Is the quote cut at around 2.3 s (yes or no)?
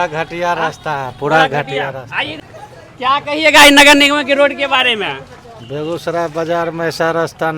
yes